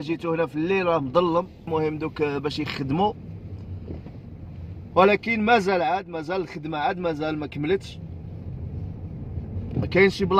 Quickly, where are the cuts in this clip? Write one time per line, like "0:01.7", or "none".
0:01.6